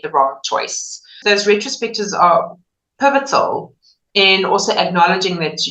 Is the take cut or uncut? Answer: cut